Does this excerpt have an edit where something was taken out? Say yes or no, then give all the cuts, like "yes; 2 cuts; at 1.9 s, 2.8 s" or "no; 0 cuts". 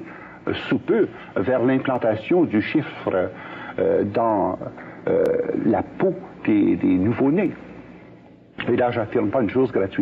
no; 0 cuts